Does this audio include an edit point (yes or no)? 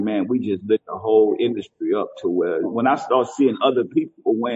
yes